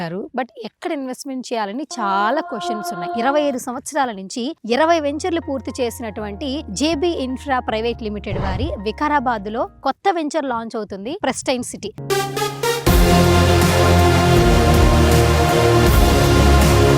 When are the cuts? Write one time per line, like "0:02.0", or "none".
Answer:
0:03.0
0:11.2